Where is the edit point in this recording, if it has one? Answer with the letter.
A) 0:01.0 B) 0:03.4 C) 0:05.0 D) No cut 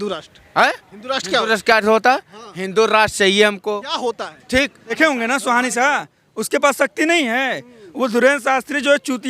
C